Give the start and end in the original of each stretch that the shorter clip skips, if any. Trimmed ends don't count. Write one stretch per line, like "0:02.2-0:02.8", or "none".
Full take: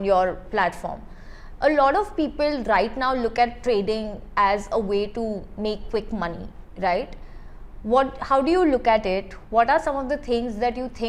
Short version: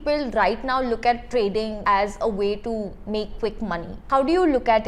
0:04.1-0:04.3
0:06.5-0:08.2